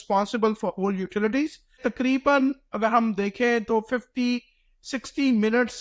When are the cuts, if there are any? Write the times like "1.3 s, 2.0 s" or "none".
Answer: 1.8 s